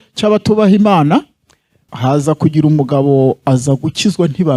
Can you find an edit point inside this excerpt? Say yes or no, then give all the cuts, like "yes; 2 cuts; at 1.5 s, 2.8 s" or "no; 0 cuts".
yes; 1 cut; at 1.8 s